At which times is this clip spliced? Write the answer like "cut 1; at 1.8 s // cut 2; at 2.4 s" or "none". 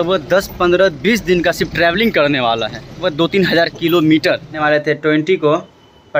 cut 1; at 3.0 s // cut 2; at 4.6 s